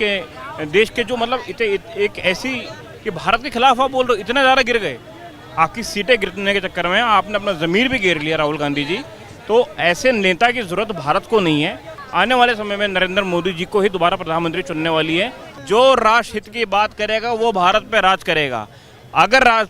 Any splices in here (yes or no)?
yes